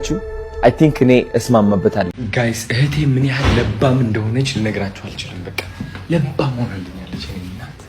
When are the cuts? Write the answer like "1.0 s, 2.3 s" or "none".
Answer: 2.2 s